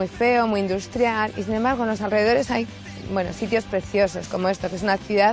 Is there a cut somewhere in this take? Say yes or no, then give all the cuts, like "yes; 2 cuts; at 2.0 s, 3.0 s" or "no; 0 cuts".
no; 0 cuts